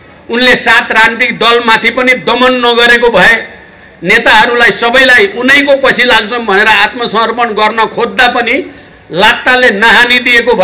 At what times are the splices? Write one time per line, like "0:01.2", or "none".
none